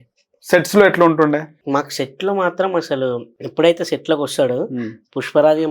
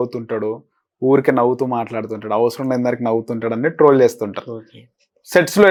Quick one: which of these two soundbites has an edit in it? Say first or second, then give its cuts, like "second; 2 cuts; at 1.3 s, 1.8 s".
first; 1 cut; at 3.4 s